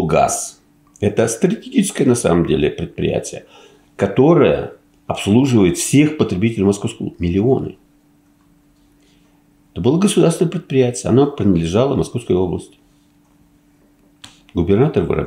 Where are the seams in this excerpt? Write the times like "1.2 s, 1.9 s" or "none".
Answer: none